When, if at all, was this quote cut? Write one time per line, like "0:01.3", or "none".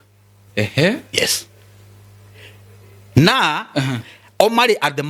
none

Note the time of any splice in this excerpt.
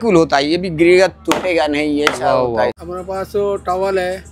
0:02.9

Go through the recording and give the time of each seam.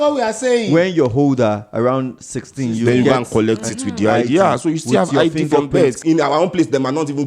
0:06.0

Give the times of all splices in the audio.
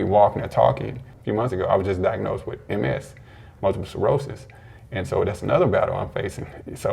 0:01.1

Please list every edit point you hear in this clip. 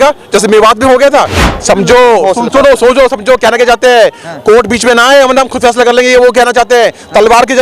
0:01.4

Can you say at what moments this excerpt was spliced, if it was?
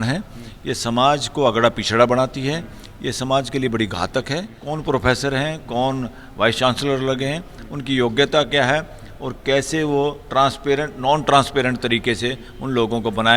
0:04.5

